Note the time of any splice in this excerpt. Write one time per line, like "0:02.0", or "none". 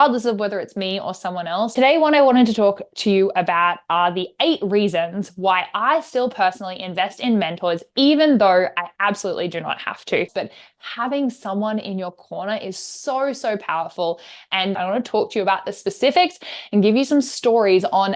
0:01.7
0:10.3
0:14.8